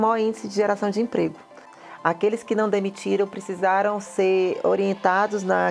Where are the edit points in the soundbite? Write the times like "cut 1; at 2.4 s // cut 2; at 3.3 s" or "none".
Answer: cut 1; at 1.8 s